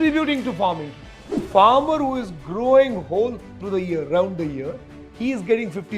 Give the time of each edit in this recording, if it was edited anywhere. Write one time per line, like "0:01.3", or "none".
0:01.5
0:03.5